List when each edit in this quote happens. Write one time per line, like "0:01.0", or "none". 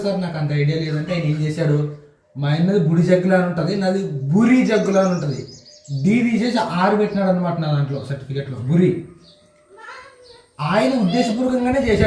none